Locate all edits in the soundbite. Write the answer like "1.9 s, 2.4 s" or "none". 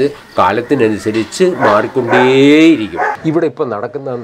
3.2 s